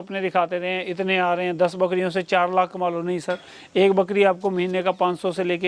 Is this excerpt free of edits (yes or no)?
yes